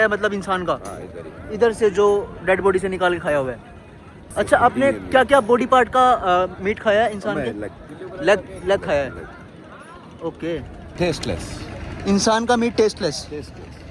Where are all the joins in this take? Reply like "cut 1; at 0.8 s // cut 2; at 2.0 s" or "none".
cut 1; at 4.3 s // cut 2; at 10.8 s